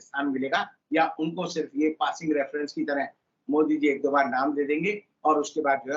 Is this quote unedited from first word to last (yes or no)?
yes